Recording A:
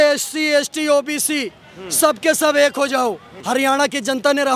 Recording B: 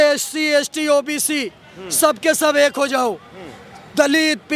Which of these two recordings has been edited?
A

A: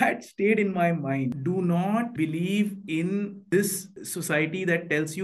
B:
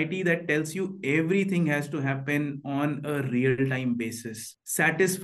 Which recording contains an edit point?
A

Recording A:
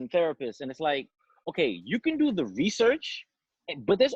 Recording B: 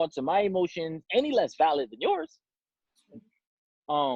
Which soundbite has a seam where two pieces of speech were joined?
B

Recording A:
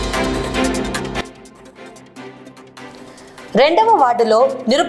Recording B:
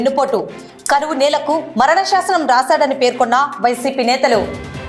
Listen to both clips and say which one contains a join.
A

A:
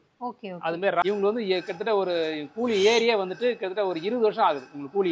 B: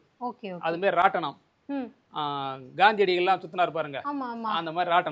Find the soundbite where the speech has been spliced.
A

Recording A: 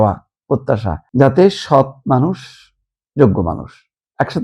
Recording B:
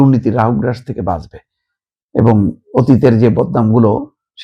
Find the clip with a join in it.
A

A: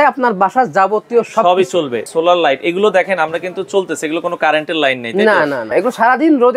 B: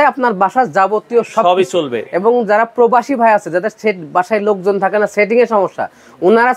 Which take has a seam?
A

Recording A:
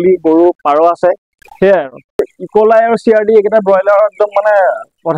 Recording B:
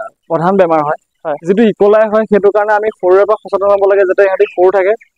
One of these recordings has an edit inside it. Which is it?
A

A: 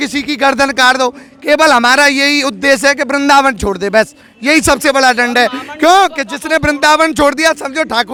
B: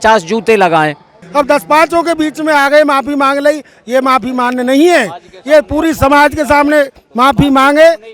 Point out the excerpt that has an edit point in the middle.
B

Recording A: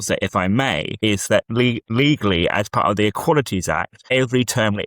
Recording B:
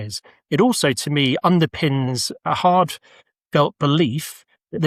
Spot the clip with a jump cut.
A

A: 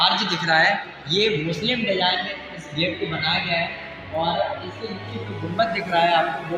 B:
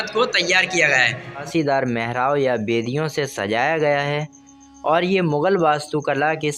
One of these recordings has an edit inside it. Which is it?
B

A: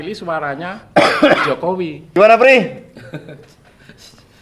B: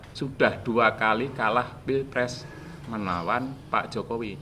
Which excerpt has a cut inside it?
A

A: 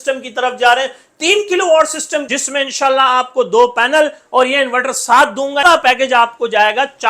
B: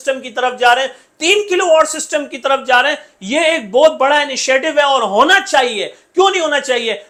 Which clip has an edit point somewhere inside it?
A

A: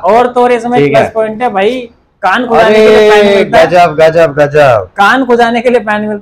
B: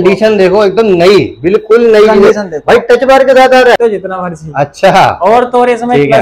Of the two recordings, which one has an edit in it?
B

